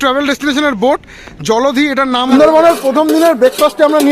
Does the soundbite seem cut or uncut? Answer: cut